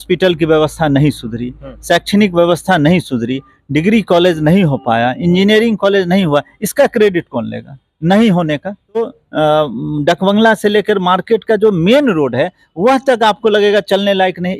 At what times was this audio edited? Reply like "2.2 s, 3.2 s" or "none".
9.2 s